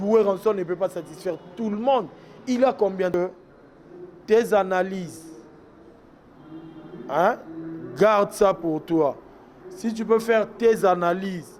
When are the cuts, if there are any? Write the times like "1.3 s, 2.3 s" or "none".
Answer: 3.1 s